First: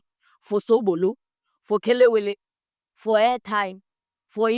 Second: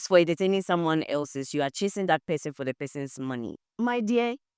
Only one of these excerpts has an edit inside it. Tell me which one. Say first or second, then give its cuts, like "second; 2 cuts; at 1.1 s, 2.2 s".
second; 1 cut; at 3.6 s